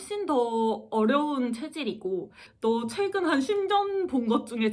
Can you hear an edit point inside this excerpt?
yes; 1 cut; at 2.5 s

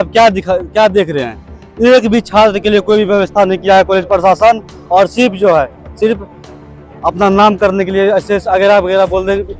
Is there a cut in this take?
no; 0 cuts

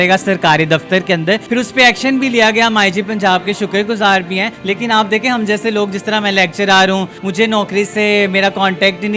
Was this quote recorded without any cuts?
no; 3 cuts; at 1.4 s, 4.5 s, 7.2 s

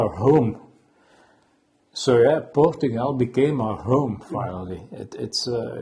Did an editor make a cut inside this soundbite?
no; 0 cuts

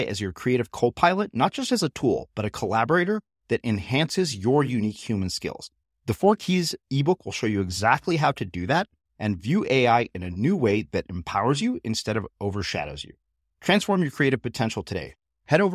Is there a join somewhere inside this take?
no; 0 cuts

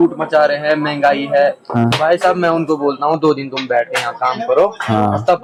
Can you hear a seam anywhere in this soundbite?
no; 0 cuts

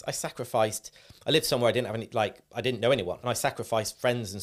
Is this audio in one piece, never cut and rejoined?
no; 1 cut; at 3.2 s

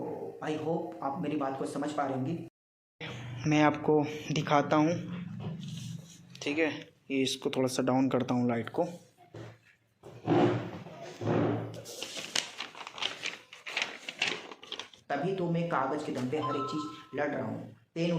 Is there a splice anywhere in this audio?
yes; 2 cuts; at 2.4 s, 14.9 s

